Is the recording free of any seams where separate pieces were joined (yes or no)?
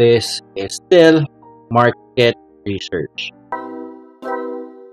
no